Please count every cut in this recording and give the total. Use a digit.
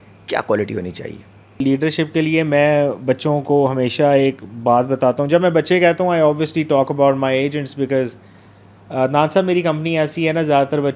0